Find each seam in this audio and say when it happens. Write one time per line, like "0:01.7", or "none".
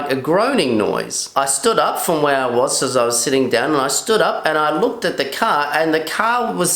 none